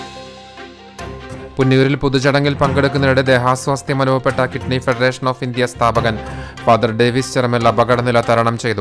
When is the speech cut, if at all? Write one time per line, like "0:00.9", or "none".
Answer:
0:01.5

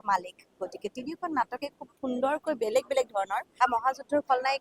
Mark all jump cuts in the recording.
0:03.4

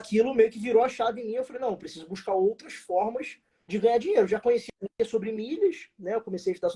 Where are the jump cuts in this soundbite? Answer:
none

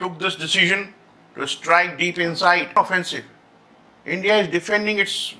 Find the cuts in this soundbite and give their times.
0:02.8

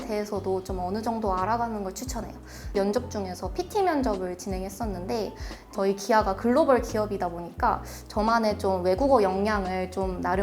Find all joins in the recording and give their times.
0:02.7
0:05.7

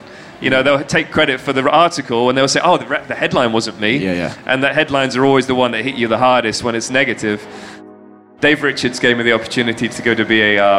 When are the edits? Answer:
0:07.9

